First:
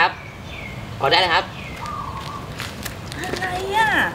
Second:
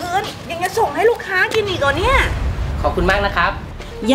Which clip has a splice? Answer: second; 1 cut; at 2.7 s

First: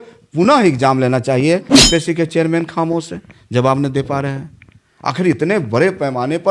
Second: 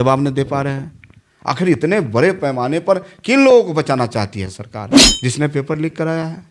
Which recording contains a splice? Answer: first; 1 cut; at 1.7 s

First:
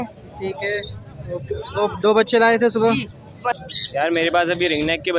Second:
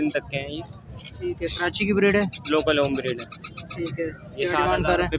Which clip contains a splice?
first; 1 cut; at 3.6 s

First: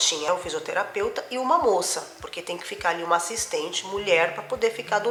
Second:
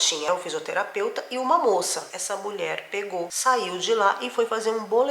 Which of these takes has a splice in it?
second; 1 cut; at 2.1 s

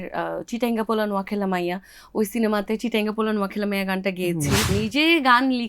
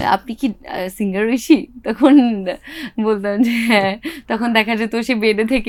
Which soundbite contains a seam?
first; 1 cut; at 4.7 s

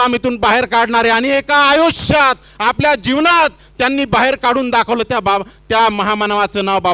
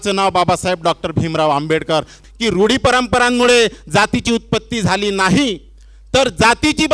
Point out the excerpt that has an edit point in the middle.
second; 1 cut; at 2.2 s

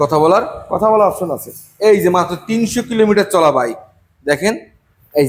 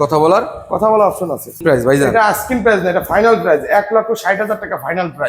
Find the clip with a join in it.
second; 1 cut; at 1.6 s

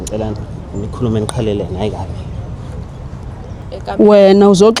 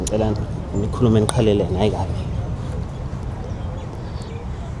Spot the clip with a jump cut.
first; 1 cut; at 3.6 s

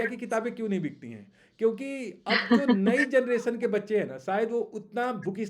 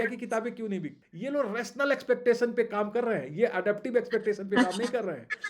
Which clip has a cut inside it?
second; 1 cut; at 1.1 s

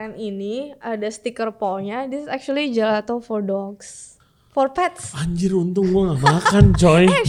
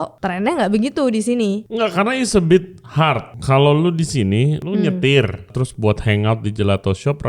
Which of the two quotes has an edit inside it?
second; 4 cuts; at 1.7 s, 3.3 s, 4.6 s, 5.6 s

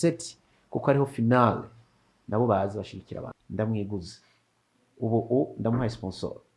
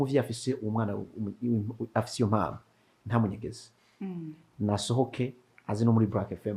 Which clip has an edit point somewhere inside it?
first; 1 cut; at 3.4 s

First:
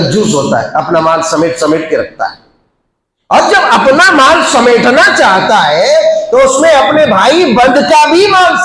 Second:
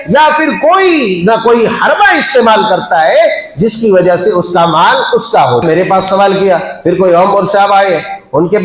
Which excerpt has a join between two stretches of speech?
second; 1 cut; at 5.6 s

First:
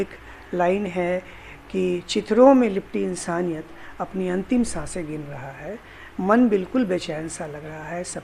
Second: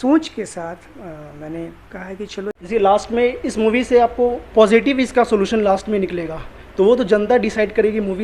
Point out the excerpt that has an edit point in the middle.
second; 1 cut; at 2.6 s

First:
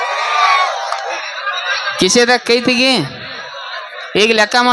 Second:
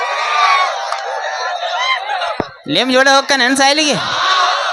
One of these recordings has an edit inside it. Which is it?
first; 1 cut; at 1.2 s

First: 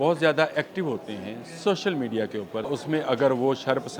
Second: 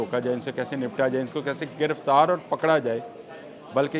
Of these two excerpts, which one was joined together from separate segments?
first; 1 cut; at 2.7 s

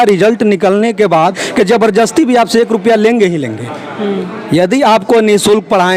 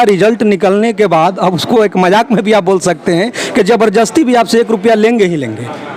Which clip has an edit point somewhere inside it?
first; 1 cut; at 1.4 s

